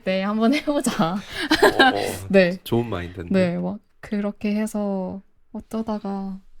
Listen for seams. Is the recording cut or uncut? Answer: uncut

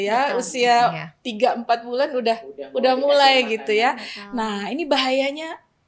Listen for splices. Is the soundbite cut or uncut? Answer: uncut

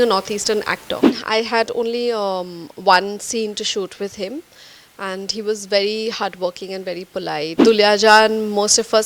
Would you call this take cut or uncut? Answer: cut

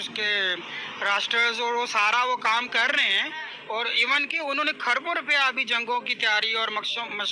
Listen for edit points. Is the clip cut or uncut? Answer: uncut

